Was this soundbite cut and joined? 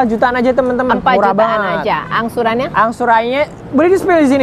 no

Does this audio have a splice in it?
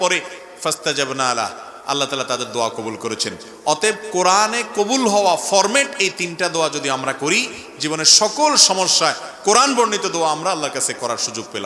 no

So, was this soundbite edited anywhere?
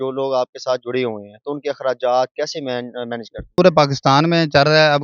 yes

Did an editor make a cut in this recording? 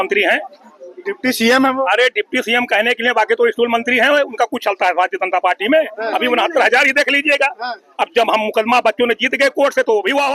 no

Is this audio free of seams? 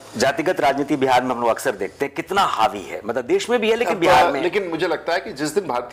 yes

